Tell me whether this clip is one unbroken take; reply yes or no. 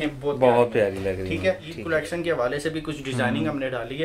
no